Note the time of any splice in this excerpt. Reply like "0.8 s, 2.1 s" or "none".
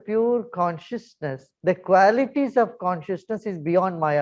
1.5 s